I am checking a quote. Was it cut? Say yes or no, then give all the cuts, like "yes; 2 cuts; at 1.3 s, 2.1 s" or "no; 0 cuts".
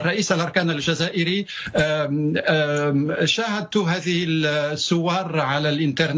no; 0 cuts